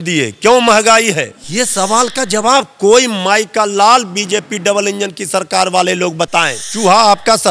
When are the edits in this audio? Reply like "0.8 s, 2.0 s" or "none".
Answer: 1.4 s, 6.6 s